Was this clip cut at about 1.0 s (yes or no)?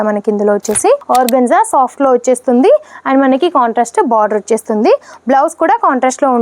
yes